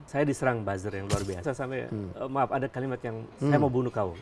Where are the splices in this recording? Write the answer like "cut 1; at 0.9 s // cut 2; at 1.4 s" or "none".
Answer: cut 1; at 1.4 s // cut 2; at 3.3 s